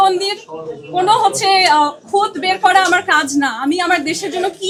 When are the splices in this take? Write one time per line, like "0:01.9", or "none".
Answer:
none